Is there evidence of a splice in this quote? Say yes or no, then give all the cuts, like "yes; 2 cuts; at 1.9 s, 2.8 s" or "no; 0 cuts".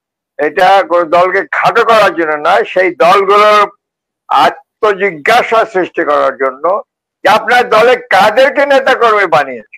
no; 0 cuts